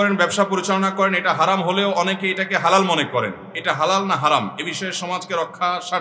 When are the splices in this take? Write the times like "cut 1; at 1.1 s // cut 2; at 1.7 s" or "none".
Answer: none